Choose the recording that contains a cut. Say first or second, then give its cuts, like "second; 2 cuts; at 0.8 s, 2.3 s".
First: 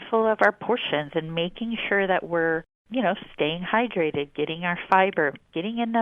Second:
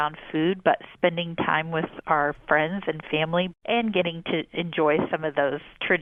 first; 1 cut; at 2.8 s